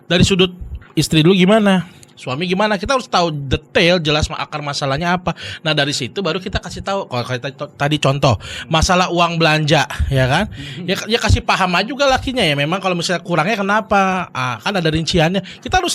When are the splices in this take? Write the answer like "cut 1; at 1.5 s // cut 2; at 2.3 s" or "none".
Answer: none